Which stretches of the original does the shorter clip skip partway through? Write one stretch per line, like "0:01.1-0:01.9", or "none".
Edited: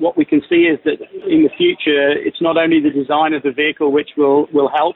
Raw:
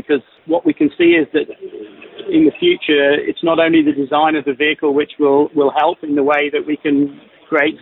0:01.6-0:02.1